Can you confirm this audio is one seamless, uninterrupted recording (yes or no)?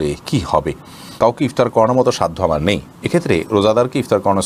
no